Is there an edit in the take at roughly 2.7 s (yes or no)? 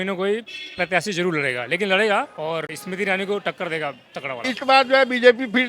yes